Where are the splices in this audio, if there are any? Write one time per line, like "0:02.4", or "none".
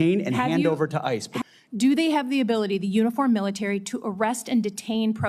0:01.3